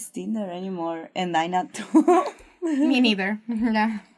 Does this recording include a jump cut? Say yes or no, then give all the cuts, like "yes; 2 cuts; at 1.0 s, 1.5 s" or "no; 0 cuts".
no; 0 cuts